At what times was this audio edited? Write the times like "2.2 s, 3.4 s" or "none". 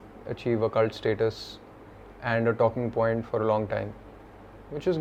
none